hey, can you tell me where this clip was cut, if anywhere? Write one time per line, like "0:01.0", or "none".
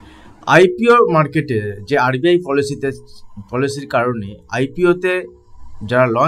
none